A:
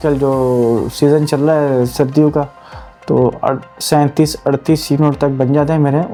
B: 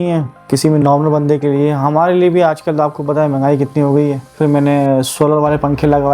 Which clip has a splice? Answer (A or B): B